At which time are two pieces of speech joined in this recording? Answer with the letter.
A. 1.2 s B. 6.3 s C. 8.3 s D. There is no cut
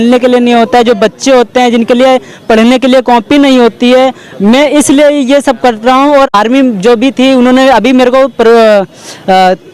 B